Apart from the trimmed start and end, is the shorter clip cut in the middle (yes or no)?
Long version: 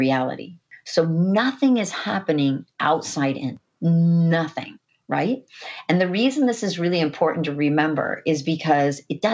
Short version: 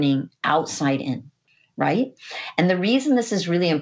yes